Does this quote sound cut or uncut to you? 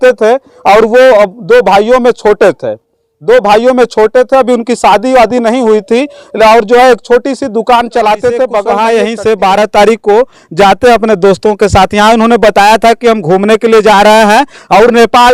cut